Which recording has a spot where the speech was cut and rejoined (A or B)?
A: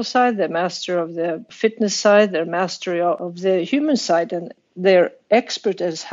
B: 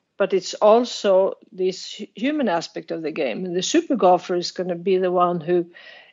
A